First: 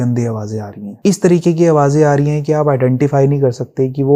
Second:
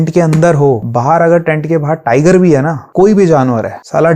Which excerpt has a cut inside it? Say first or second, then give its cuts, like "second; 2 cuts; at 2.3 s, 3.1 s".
second; 1 cut; at 2.9 s